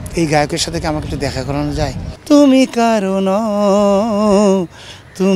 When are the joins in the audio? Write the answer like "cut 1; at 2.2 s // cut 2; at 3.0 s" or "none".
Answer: cut 1; at 2.2 s